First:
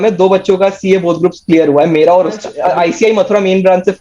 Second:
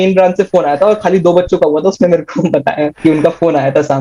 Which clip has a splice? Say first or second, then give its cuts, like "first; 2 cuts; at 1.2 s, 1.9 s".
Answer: first; 1 cut; at 2.5 s